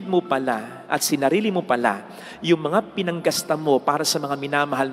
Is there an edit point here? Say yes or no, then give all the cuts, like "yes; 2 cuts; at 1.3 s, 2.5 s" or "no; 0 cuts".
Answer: no; 0 cuts